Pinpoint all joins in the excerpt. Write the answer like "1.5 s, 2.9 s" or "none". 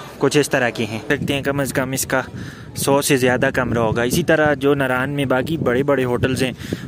1.1 s